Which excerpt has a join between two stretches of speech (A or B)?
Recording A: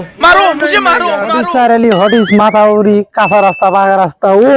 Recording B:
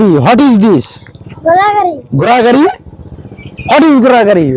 A